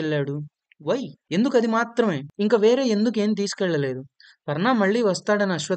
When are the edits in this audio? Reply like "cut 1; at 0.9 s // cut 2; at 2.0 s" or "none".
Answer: cut 1; at 1.2 s // cut 2; at 2.3 s